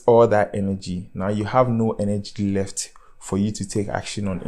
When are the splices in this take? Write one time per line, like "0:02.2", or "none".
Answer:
none